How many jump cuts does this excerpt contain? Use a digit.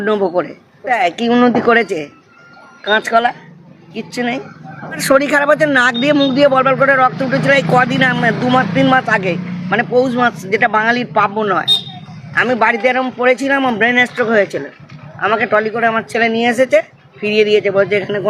2